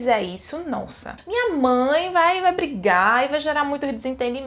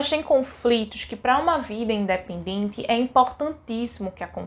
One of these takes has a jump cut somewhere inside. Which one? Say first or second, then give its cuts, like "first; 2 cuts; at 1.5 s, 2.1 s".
first; 1 cut; at 1.0 s